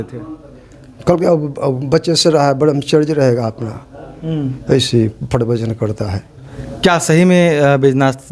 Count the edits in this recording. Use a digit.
1